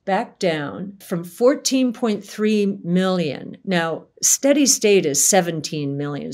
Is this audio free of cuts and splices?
no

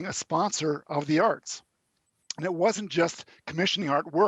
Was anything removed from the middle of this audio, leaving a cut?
no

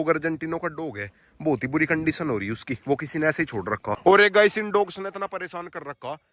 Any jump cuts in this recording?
yes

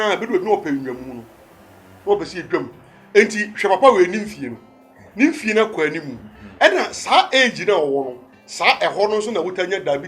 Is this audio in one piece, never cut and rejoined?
yes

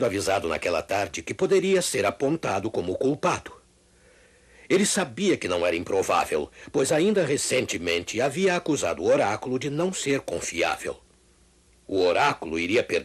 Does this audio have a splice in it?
no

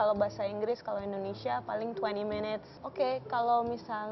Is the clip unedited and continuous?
no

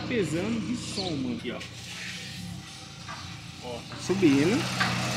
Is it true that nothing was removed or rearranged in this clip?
no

